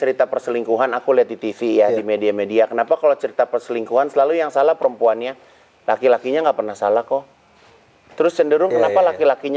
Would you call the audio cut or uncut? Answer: uncut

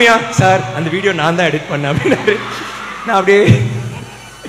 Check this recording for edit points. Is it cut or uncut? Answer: uncut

